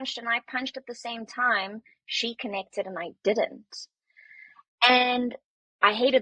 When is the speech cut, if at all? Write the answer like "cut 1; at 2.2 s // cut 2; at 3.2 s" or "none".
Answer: none